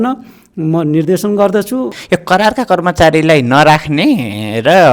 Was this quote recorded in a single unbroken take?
no; 1 cut; at 2.0 s

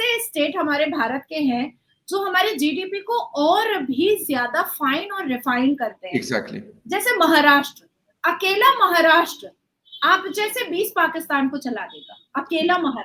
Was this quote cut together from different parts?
no; 0 cuts

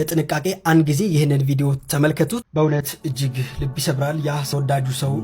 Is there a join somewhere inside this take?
yes; 1 cut; at 2.5 s

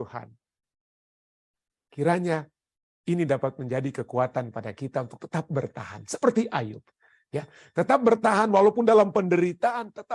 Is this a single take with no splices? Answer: no; 1 cut; at 1.1 s

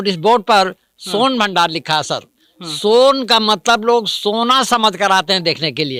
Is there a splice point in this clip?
no; 0 cuts

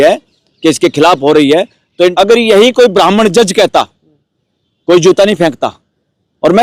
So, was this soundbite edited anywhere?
yes; 1 cut; at 1.8 s

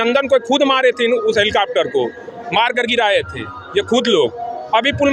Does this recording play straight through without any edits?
yes; 0 cuts

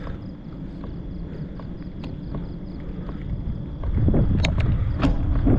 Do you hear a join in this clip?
no; 0 cuts

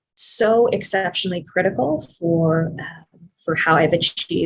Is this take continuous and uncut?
yes; 0 cuts

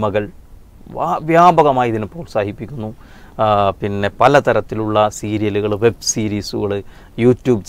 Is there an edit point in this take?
no; 0 cuts

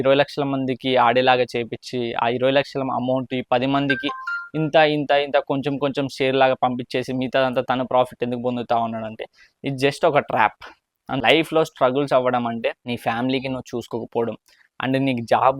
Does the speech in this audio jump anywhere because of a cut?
yes; 2 cuts; at 11.2 s, 12.8 s

